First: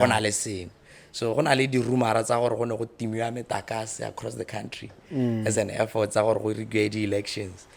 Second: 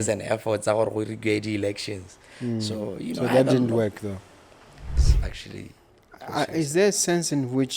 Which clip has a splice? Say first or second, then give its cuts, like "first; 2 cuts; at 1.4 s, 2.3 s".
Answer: second; 1 cut; at 5.1 s